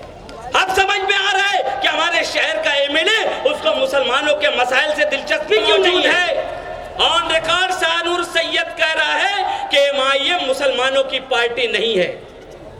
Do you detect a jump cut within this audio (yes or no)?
yes